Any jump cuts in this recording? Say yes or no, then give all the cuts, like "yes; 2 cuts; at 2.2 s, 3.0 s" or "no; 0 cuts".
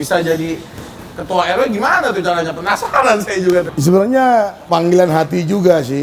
yes; 2 cuts; at 3.7 s, 4.6 s